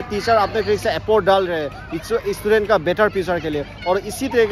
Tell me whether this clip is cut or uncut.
uncut